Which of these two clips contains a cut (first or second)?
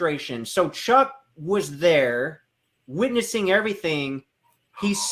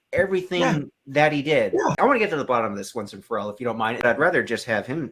second